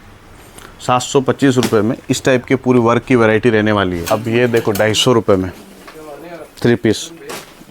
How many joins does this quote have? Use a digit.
1